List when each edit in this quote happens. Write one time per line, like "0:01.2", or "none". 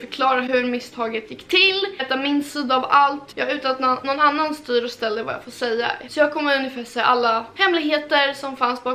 0:02.0
0:03.3